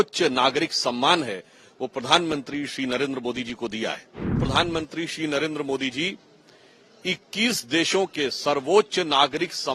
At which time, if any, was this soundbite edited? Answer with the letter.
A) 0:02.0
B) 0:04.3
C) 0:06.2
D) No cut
B